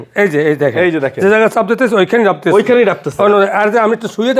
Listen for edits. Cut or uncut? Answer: uncut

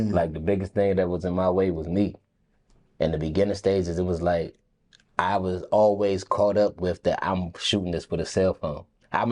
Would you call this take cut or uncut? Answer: uncut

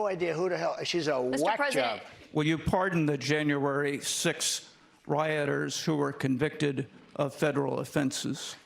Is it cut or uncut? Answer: cut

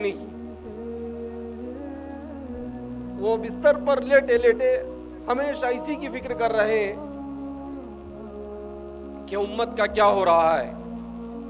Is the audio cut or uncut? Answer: uncut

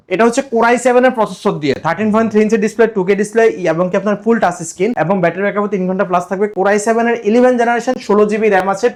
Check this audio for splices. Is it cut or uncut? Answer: uncut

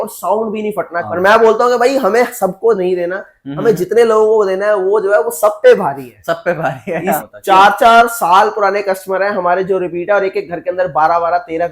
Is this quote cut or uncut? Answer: cut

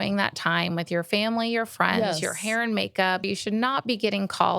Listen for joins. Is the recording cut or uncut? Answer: cut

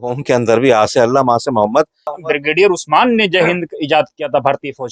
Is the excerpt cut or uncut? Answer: cut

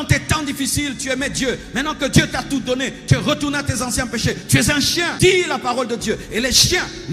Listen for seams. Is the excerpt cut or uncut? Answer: cut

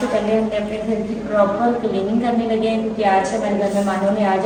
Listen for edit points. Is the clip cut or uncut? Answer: uncut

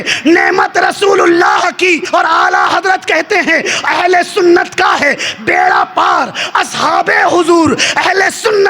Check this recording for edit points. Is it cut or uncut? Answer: cut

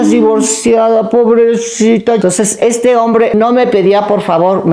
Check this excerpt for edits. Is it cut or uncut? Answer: cut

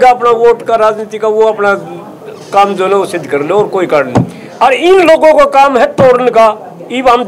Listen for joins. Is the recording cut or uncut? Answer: cut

